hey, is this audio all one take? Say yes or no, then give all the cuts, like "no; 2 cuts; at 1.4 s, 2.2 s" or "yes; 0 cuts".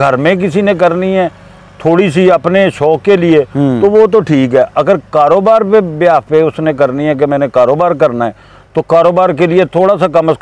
yes; 0 cuts